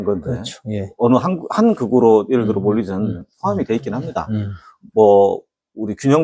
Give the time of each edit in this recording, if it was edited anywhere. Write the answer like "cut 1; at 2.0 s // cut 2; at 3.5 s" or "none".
cut 1; at 3.3 s